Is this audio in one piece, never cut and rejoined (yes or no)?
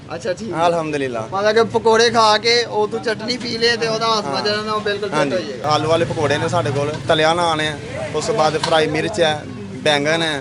no